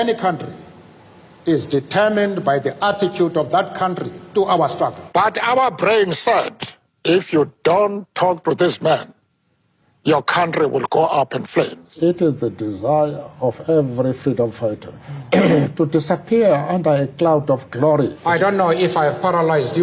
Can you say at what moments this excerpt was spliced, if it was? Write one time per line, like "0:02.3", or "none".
0:05.0
0:11.8
0:18.2